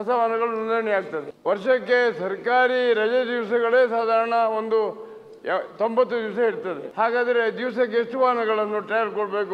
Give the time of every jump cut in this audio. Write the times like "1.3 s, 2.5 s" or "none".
1.3 s, 6.8 s